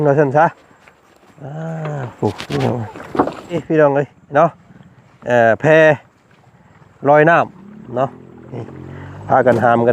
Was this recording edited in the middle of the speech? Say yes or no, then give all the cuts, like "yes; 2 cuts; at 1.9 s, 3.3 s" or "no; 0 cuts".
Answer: yes; 1 cut; at 3.6 s